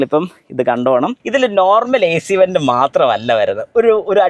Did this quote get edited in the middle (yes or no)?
yes